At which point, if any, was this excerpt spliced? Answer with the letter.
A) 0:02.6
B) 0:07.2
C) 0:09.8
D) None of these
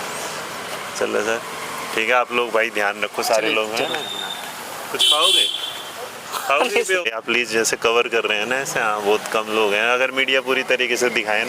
B